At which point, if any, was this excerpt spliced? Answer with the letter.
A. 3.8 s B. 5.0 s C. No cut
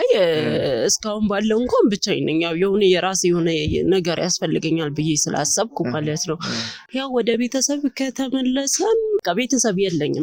C